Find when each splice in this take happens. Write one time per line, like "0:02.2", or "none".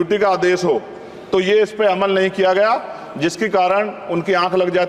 none